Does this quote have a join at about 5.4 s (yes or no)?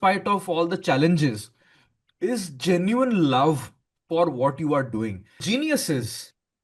yes